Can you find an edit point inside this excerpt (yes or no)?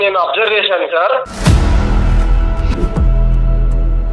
yes